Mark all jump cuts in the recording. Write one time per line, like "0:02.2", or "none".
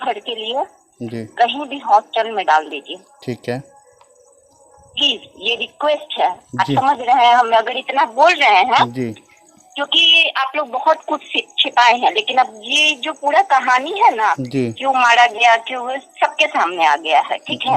none